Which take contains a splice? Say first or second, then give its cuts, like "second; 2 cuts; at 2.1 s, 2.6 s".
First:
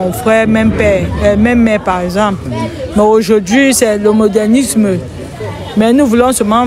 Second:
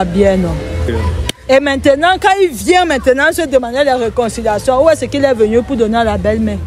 second; 1 cut; at 0.9 s